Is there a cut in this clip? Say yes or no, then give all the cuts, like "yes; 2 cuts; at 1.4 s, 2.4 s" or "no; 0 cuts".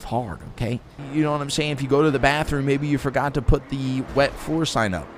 yes; 1 cut; at 1.0 s